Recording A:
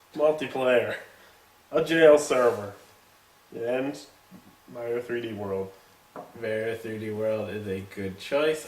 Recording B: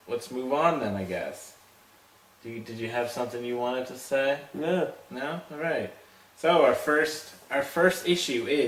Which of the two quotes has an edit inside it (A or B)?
A